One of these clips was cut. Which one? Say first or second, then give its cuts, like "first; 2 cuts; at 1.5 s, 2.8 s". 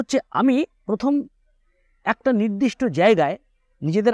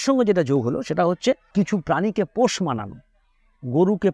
second; 1 cut; at 1.4 s